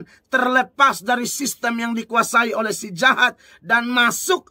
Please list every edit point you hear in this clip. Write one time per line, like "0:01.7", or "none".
none